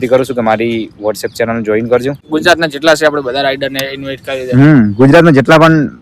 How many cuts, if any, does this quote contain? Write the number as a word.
one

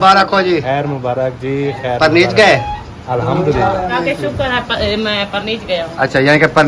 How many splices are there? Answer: one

